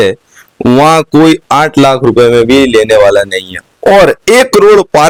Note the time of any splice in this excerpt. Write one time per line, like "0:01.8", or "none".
none